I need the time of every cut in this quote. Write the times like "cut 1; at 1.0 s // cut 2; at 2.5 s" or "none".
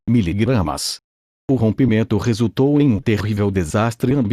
cut 1; at 1.4 s

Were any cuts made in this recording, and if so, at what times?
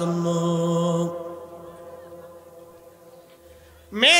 none

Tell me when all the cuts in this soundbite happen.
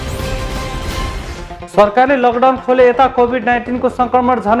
cut 1; at 1.2 s

